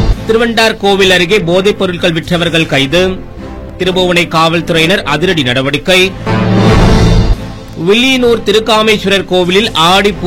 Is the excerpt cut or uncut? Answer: uncut